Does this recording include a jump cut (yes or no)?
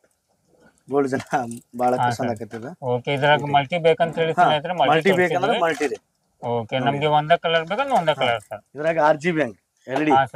no